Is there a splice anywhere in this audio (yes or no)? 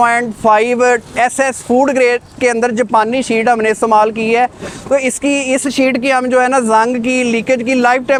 no